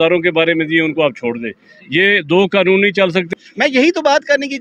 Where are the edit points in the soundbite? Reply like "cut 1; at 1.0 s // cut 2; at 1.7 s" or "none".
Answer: cut 1; at 3.3 s